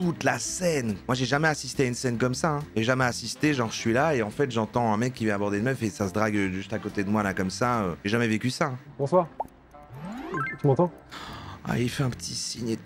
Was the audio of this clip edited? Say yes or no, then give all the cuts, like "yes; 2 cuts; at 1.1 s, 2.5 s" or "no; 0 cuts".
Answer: no; 0 cuts